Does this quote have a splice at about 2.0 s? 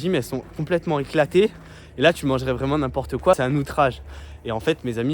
no; 1 cut; at 3.4 s

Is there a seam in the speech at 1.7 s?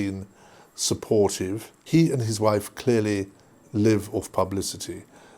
yes; 1 cut; at 1.7 s

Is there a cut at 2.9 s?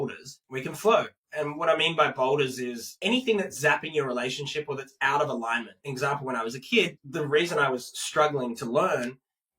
yes; 3 cuts; at 2.9 s, 5.8 s, 7.0 s

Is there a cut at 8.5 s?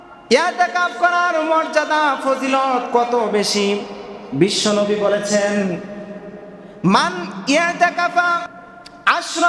yes; 1 cut; at 8.5 s

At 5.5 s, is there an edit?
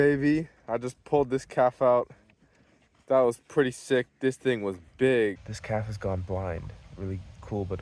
yes; 1 cut; at 5.5 s

